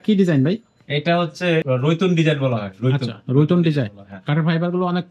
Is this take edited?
yes; 1 cut; at 1.6 s

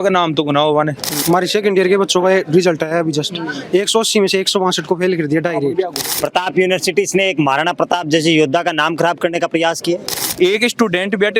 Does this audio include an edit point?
yes; 3 cuts; at 1.1 s, 6.0 s, 10.2 s

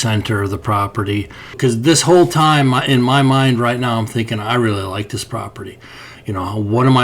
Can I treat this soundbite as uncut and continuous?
no; 1 cut; at 1.6 s

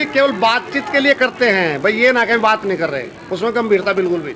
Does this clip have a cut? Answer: no; 0 cuts

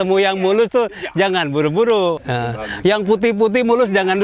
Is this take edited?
yes; 1 cut; at 2.2 s

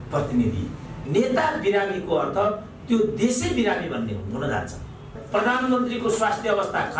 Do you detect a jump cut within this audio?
yes; 2 cuts; at 0.9 s, 5.1 s

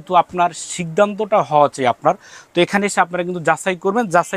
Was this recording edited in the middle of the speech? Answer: no; 0 cuts

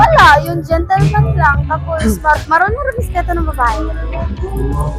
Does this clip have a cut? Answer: no; 0 cuts

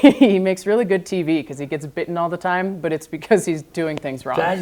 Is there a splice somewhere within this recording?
no; 0 cuts

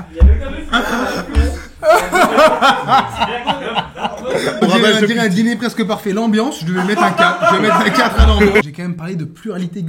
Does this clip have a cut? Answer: yes; 2 cuts; at 4.6 s, 8.6 s

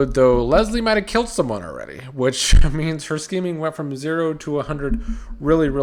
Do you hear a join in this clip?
no; 0 cuts

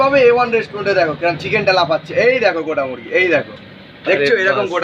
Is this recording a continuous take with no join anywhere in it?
yes; 0 cuts

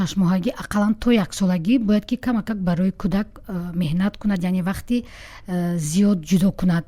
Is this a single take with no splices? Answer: yes; 0 cuts

